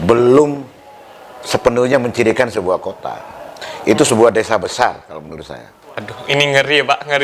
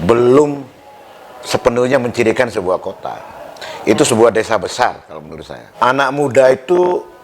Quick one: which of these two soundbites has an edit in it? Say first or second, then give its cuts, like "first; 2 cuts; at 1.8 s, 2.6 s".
second; 1 cut; at 5.6 s